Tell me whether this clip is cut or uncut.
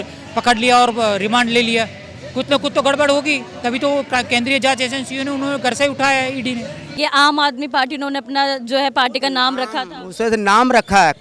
cut